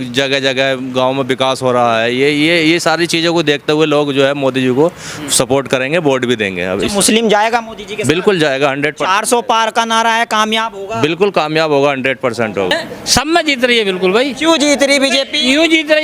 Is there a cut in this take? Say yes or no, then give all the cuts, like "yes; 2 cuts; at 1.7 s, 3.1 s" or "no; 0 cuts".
yes; 1 cut; at 12.8 s